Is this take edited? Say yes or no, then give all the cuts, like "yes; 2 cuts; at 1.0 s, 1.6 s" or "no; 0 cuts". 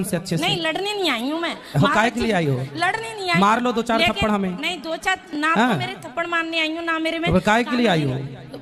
no; 0 cuts